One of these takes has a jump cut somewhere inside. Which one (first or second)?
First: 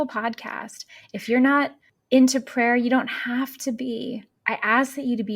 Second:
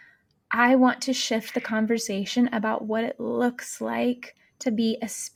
first